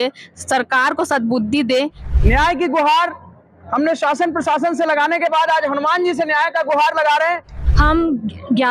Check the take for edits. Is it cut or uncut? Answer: cut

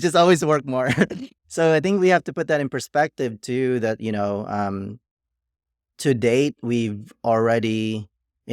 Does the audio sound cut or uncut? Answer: uncut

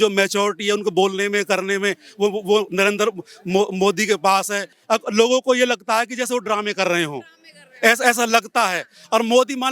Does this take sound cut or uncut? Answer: cut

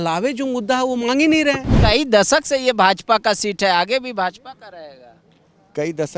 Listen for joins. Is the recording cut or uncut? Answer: cut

